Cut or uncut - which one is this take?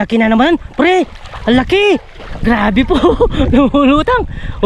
uncut